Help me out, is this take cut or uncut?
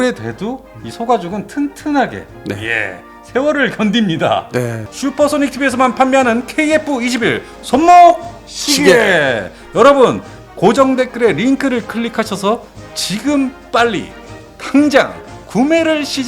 cut